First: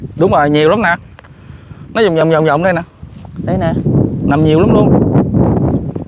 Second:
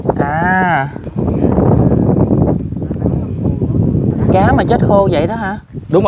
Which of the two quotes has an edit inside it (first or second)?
second